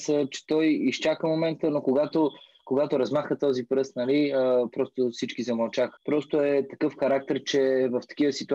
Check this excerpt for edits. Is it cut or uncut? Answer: cut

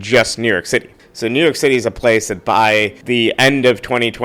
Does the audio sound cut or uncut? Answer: cut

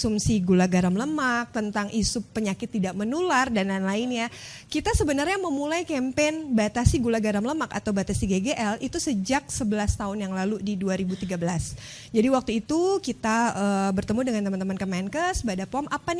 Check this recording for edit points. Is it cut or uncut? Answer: uncut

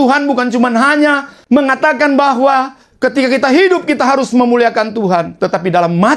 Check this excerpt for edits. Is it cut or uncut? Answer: cut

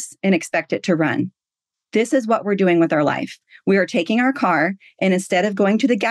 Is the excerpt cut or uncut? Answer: uncut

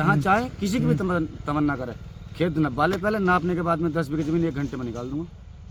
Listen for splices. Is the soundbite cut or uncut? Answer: uncut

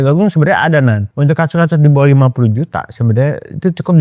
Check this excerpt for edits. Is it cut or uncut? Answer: cut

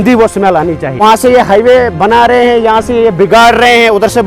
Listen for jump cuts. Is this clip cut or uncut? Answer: cut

